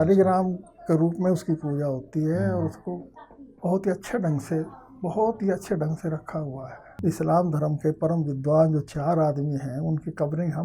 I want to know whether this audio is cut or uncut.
cut